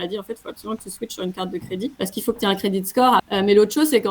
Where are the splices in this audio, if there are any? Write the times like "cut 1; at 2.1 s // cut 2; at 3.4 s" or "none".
cut 1; at 1.9 s // cut 2; at 3.3 s

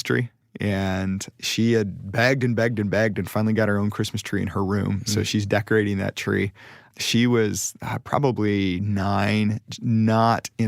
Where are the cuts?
none

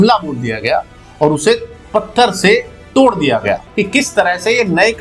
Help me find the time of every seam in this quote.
cut 1; at 3.7 s

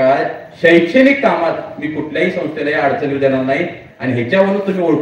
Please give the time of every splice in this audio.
cut 1; at 3.8 s

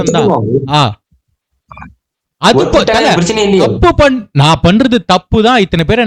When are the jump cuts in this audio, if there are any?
none

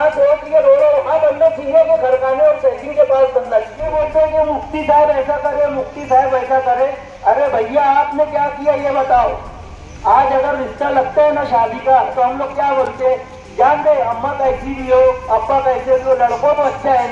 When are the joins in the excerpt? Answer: cut 1; at 4.0 s

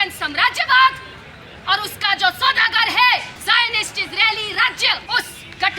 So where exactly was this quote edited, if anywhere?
cut 1; at 3.3 s // cut 2; at 5.0 s

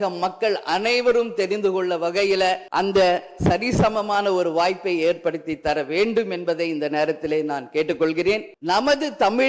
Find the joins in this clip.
cut 1; at 2.6 s // cut 2; at 8.5 s

